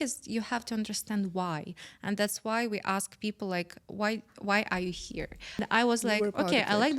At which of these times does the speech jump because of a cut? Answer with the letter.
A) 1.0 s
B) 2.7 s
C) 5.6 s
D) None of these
C